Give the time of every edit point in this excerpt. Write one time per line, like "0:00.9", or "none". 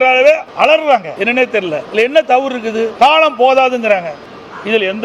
0:01.5
0:02.9